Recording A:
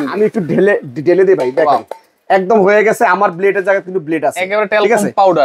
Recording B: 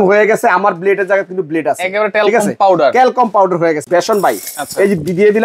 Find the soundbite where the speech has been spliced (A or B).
B